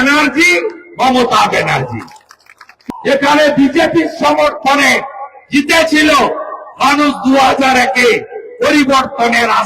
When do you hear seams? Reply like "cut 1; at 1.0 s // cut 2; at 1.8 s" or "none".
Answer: cut 1; at 2.7 s